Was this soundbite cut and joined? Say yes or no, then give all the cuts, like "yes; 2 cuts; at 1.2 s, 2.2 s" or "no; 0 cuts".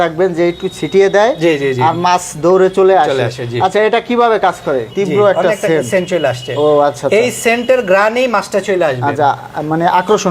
yes; 1 cut; at 4.9 s